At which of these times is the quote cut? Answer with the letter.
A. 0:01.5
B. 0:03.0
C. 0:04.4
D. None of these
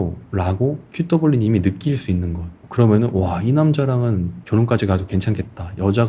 C